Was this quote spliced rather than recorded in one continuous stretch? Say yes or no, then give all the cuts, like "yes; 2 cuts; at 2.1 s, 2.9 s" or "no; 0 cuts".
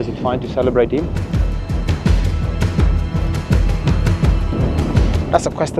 no; 0 cuts